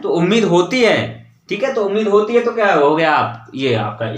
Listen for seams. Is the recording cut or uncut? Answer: uncut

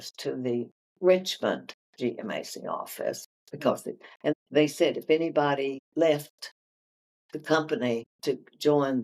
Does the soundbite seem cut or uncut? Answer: cut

